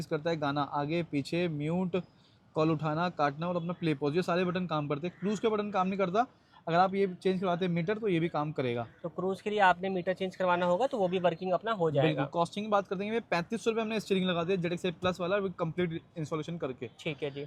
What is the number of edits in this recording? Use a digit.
0